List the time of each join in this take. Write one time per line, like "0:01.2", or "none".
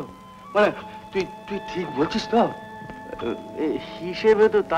none